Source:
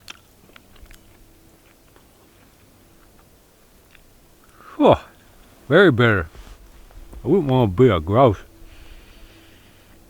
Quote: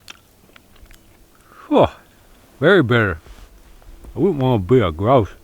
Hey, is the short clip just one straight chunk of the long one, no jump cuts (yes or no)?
no